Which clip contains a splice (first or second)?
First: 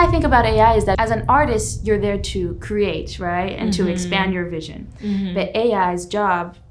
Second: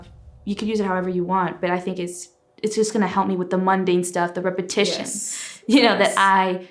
first